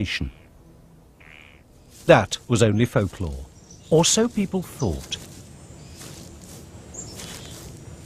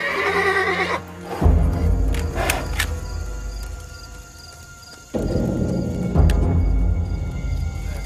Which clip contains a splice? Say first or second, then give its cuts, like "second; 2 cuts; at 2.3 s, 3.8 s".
second; 1 cut; at 4.7 s